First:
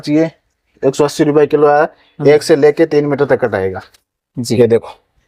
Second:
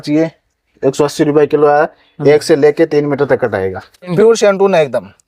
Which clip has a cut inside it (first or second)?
second